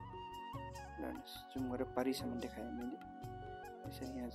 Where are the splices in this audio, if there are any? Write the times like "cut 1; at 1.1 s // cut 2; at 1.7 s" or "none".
none